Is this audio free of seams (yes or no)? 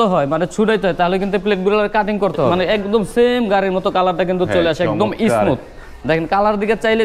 no